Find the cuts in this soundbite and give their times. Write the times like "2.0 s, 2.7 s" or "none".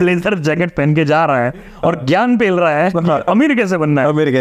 none

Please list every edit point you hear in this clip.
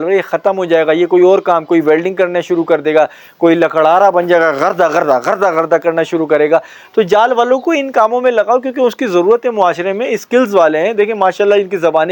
none

